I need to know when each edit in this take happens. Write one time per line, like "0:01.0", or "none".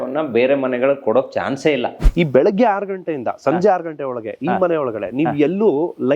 0:02.0

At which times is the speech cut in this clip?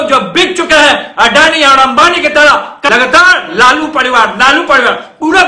0:02.9

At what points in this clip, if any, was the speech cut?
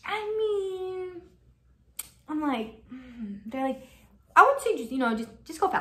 none

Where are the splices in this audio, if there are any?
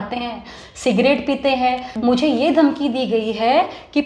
0:01.9

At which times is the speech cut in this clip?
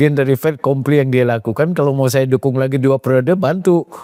none

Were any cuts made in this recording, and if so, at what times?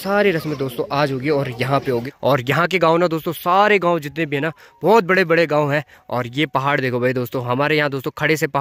0:02.1

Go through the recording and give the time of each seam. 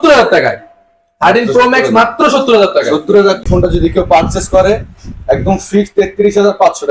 0:03.5

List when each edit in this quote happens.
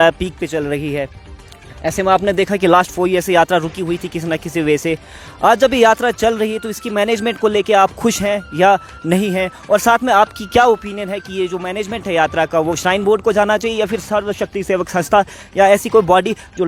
none

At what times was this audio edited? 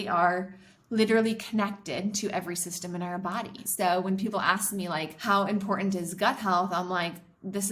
0:03.6
0:05.1

